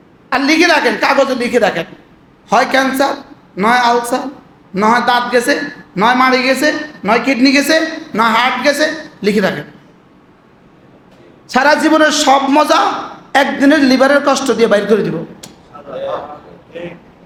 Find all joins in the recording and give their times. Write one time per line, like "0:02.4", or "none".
none